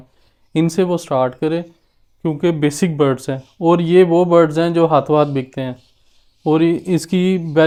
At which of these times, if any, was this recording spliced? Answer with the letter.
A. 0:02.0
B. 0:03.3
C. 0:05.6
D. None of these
D